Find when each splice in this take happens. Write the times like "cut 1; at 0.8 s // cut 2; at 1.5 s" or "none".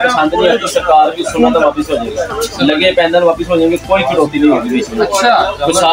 none